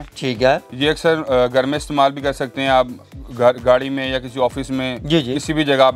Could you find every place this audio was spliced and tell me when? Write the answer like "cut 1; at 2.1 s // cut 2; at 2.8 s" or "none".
none